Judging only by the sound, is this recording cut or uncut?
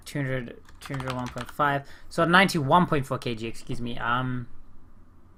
uncut